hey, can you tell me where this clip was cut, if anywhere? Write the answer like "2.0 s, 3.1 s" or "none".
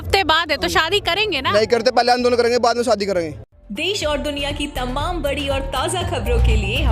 3.6 s